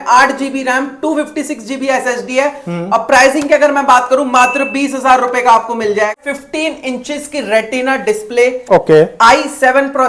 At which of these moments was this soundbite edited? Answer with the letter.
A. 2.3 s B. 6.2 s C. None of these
B